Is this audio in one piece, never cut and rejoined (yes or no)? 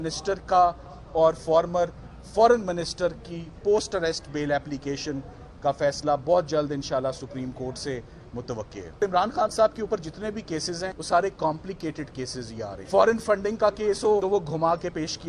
no